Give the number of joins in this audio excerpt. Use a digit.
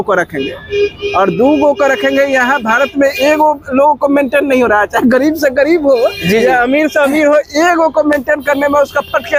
0